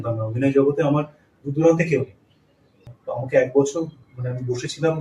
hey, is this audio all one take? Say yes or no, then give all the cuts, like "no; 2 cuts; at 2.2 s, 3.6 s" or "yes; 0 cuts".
no; 1 cut; at 2.8 s